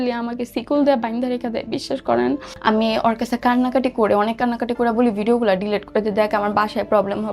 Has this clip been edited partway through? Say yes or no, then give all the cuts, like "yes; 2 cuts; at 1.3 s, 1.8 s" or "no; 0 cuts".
yes; 1 cut; at 2.5 s